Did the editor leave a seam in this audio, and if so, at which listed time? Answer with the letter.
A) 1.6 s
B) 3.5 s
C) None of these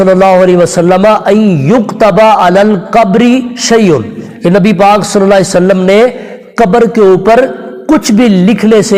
C